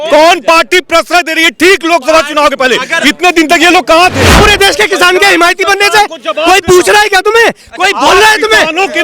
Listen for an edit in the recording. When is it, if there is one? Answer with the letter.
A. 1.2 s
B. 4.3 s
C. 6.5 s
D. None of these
B